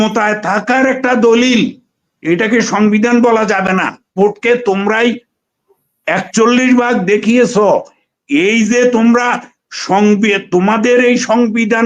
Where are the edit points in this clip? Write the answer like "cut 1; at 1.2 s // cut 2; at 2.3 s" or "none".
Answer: cut 1; at 4.1 s